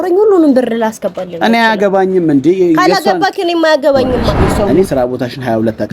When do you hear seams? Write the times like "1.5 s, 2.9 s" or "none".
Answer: 4.7 s